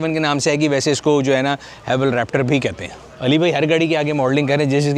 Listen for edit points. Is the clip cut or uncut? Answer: uncut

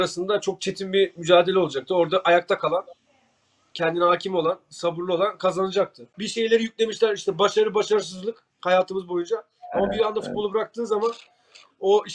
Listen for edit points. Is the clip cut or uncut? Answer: cut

